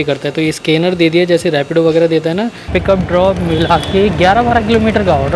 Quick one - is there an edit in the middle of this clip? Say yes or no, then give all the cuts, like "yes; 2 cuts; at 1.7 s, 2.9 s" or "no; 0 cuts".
yes; 1 cut; at 2.7 s